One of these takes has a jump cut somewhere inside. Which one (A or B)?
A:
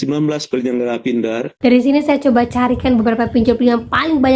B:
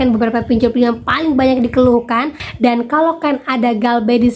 B